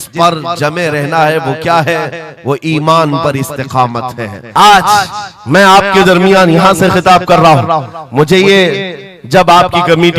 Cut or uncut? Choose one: cut